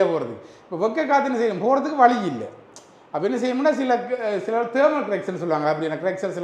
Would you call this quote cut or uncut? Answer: uncut